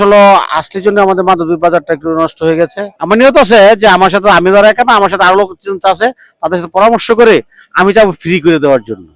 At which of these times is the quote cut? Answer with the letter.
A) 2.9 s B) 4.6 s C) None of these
A